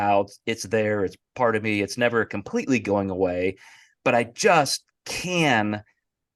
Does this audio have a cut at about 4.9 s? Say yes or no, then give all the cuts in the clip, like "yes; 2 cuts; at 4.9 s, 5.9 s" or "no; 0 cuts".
no; 0 cuts